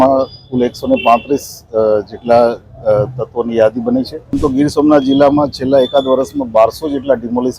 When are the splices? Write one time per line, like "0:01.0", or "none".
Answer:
0:04.4